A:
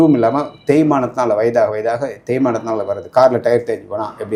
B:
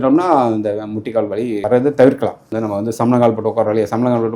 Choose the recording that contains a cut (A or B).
B